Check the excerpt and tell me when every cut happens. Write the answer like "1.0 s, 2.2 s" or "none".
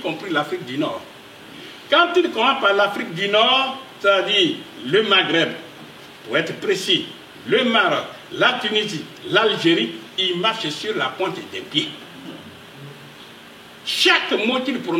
none